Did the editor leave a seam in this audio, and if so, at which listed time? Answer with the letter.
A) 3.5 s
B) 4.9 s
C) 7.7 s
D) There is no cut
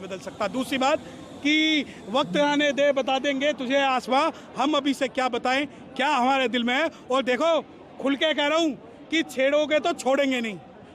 D